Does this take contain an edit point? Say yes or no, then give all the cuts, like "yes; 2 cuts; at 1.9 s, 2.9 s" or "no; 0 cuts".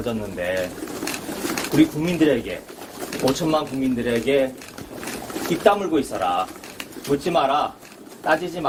no; 0 cuts